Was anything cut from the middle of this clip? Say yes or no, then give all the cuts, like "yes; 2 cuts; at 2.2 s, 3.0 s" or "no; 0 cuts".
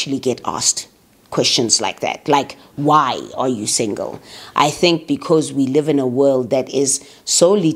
no; 0 cuts